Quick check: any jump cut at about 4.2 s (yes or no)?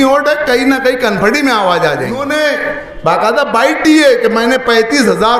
no